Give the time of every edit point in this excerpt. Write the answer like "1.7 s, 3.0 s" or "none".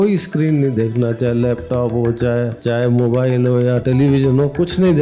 2.6 s, 3.8 s